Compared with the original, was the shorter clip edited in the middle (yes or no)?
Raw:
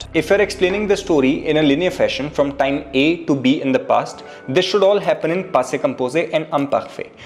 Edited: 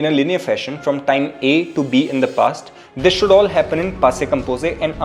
no